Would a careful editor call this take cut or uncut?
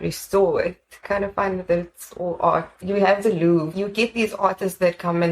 cut